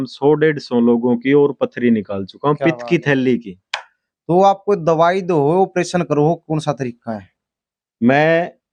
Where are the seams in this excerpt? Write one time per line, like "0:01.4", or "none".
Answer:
none